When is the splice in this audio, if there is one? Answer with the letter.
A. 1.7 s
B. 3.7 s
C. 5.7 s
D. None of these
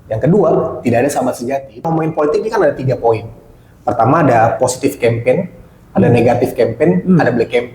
A